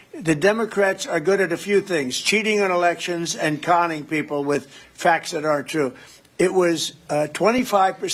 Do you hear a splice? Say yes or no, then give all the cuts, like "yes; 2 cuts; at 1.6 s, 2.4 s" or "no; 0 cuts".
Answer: no; 0 cuts